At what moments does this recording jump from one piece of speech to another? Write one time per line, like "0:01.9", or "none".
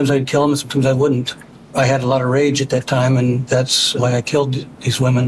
0:03.8